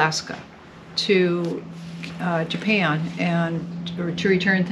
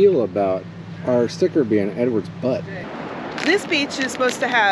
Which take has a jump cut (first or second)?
second